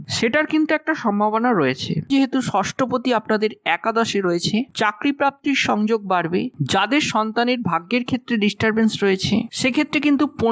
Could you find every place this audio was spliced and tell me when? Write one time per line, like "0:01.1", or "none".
0:02.1
0:06.6